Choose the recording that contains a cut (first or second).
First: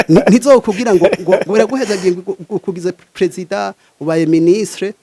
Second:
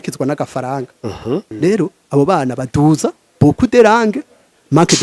second